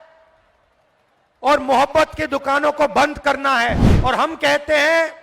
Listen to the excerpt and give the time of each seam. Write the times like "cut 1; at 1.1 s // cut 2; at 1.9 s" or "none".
cut 1; at 3.9 s